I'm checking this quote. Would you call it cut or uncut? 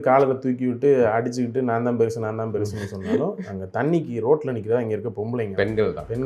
uncut